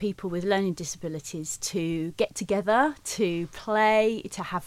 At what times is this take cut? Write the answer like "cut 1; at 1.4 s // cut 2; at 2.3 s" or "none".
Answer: none